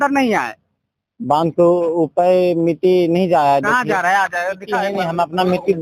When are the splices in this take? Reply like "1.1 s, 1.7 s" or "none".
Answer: 4.9 s